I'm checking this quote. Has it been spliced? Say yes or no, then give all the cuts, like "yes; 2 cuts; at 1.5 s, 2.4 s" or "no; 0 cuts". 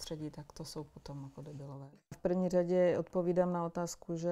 yes; 1 cut; at 2.2 s